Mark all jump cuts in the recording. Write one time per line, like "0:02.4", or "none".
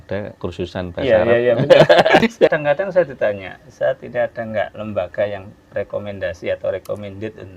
0:02.6